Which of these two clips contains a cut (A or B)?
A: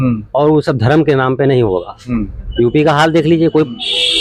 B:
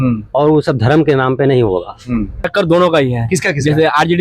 B